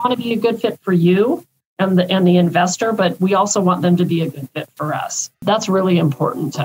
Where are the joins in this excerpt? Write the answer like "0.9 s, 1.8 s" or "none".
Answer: 5.4 s